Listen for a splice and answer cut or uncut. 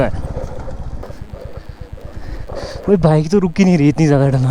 cut